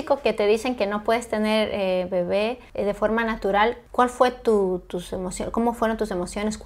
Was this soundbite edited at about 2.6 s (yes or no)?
yes